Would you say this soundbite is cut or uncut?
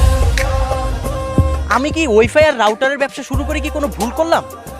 cut